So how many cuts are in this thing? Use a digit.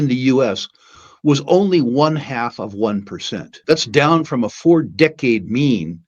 1